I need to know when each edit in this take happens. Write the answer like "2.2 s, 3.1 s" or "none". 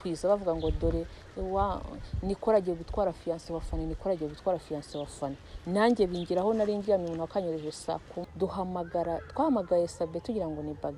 8.2 s